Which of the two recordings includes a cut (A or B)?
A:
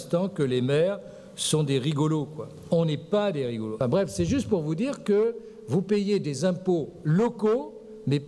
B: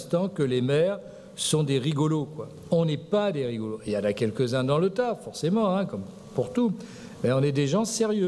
A